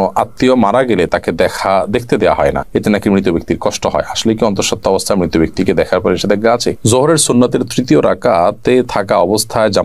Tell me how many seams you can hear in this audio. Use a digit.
1